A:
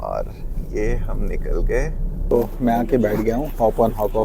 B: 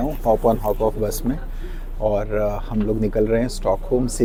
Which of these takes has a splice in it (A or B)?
A